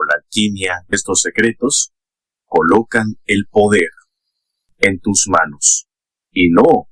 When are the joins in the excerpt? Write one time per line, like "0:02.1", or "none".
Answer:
0:00.9